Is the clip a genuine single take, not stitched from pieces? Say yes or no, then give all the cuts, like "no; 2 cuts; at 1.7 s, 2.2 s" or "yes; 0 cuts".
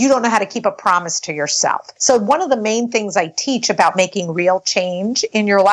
no; 1 cut; at 1.9 s